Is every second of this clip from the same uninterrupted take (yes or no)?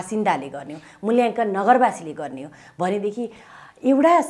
yes